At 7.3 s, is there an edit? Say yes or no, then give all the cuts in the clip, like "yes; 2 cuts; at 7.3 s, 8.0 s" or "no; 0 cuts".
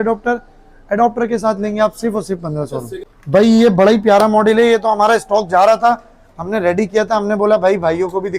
no; 1 cut; at 3.0 s